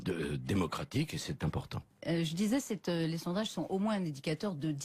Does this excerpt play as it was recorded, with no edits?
no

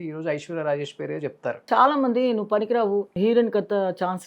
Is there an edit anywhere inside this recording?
yes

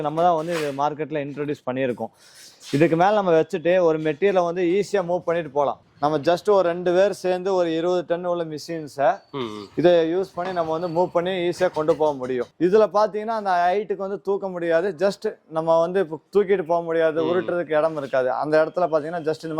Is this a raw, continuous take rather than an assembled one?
no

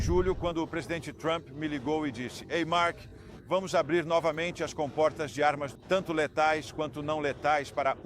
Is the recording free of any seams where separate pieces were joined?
no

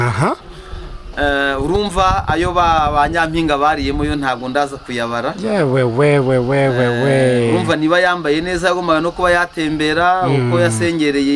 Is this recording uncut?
yes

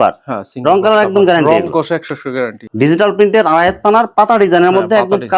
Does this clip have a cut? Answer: yes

